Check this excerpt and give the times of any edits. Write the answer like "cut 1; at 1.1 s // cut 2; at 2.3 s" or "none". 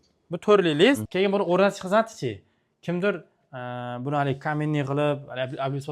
cut 1; at 1.1 s